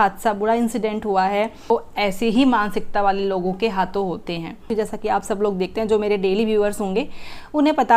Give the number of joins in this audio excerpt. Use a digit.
2